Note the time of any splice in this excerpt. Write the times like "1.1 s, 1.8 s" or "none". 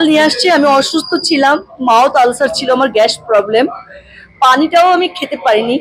none